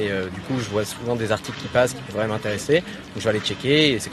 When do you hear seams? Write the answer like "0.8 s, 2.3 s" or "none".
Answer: none